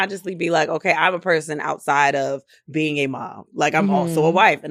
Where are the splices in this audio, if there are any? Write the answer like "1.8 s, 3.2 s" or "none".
none